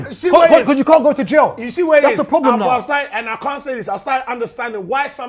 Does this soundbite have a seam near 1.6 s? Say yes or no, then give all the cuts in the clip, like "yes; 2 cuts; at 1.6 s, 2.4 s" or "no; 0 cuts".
no; 0 cuts